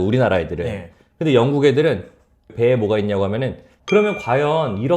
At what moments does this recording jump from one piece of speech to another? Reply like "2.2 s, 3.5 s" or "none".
3.7 s